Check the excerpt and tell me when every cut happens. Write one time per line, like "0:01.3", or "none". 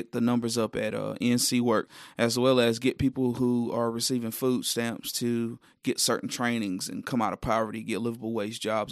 0:02.0